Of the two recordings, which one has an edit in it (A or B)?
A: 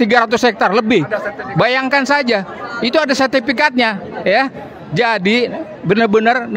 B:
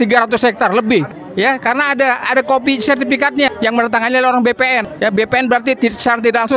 B